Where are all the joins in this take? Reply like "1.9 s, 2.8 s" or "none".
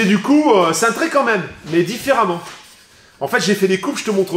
none